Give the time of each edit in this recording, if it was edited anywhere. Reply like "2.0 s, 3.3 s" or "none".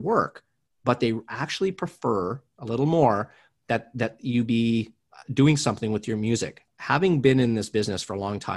6.6 s